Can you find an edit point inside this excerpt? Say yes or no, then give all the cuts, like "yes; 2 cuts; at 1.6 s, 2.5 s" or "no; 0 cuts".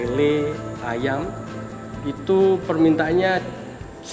no; 0 cuts